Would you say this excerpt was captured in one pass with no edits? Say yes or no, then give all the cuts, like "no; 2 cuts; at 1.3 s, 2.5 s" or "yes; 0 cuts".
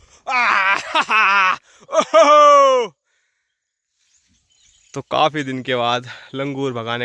yes; 0 cuts